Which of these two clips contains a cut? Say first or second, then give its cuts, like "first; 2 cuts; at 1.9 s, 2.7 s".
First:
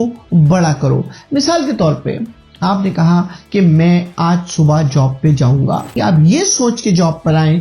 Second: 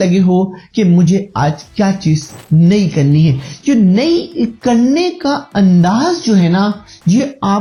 first; 1 cut; at 5.9 s